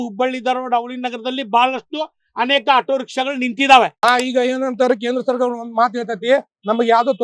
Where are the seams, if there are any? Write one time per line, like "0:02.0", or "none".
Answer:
0:03.9